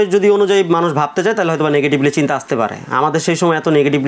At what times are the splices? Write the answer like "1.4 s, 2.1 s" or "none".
none